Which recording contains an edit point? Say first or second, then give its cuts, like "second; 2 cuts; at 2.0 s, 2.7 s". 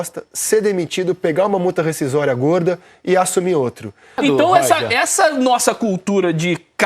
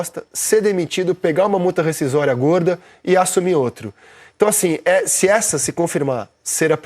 first; 1 cut; at 4.2 s